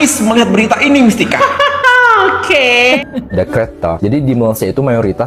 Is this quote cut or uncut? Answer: cut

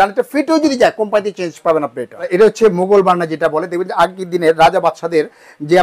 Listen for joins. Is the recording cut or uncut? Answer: cut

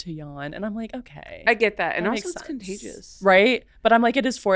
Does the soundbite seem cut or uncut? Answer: uncut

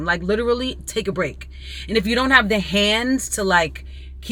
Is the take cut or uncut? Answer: uncut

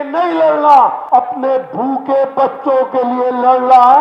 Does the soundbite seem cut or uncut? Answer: cut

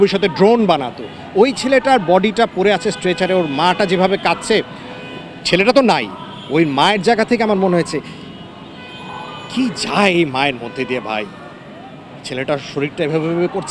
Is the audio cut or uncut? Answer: uncut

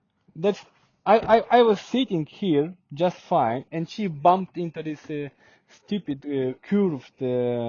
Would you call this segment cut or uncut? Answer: uncut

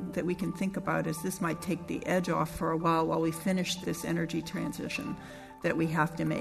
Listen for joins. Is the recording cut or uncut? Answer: uncut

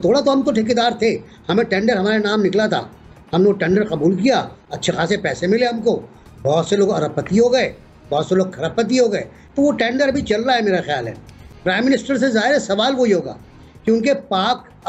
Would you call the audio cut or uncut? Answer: uncut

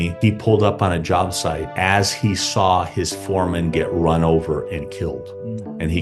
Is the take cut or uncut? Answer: uncut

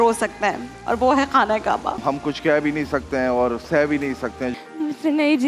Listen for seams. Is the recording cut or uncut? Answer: cut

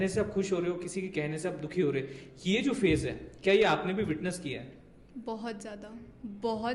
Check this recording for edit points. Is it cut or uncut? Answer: uncut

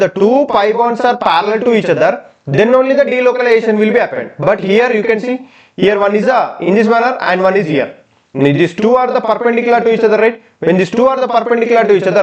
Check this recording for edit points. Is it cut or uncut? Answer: uncut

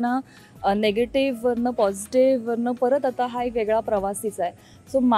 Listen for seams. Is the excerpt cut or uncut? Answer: uncut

